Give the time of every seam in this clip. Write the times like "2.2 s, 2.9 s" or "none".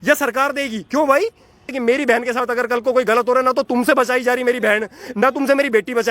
1.7 s